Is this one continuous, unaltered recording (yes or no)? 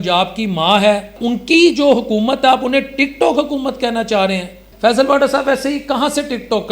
no